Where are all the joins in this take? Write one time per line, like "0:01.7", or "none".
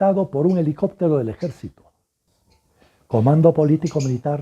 0:02.2